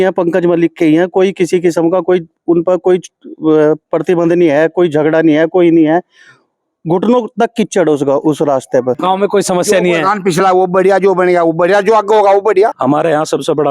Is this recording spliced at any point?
yes; 2 cuts; at 9.0 s, 12.8 s

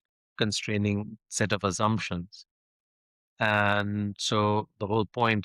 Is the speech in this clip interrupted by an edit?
no; 0 cuts

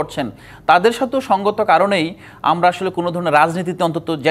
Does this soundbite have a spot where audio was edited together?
no; 0 cuts

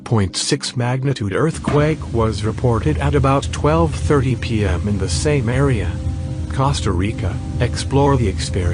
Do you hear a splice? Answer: yes; 1 cut; at 6.6 s

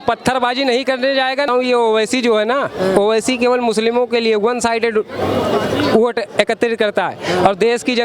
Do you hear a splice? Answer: yes; 1 cut; at 1.5 s

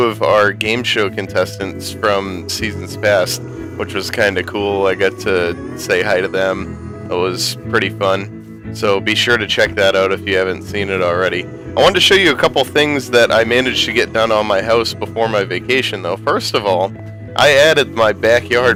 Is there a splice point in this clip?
no; 0 cuts

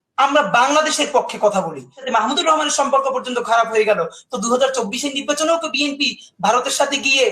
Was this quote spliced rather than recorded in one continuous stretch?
yes; 1 cut; at 2.0 s

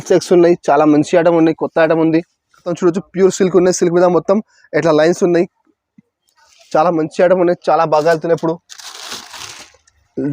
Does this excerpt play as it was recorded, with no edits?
no; 1 cut; at 2.7 s

